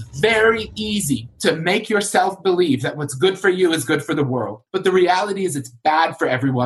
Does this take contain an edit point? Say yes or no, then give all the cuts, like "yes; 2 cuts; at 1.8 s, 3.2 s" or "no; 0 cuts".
yes; 2 cuts; at 1.3 s, 4.6 s